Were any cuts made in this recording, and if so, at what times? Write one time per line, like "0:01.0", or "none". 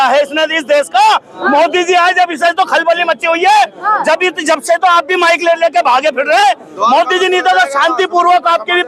none